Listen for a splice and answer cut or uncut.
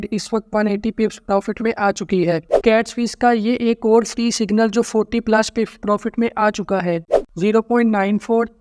cut